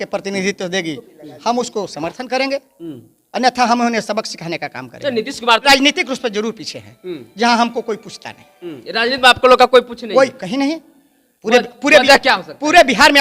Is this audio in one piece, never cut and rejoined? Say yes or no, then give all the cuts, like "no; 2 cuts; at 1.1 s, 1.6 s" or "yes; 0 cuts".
no; 1 cut; at 5.6 s